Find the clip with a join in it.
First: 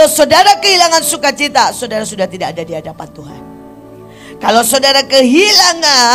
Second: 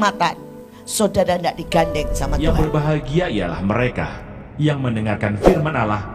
second; 1 cut; at 2.4 s

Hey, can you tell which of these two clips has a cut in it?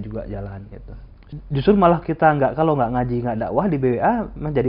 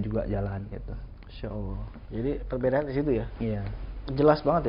first; 1 cut; at 1.3 s

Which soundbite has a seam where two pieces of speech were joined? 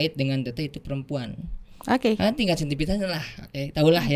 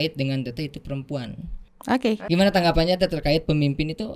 second; 1 cut; at 2.2 s

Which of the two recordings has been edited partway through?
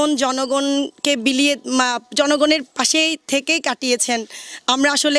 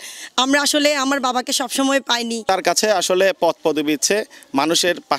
second; 1 cut; at 2.5 s

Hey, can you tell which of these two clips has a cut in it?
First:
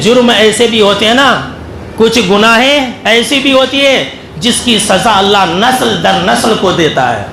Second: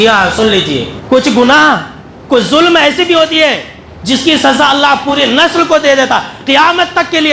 second; 1 cut; at 0.9 s

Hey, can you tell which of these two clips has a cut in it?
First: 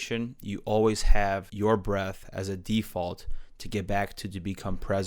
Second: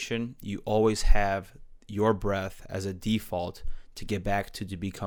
first; 1 cut; at 1.5 s

